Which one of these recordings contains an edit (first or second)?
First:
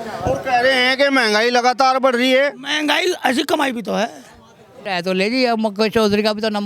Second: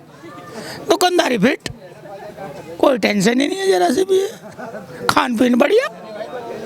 first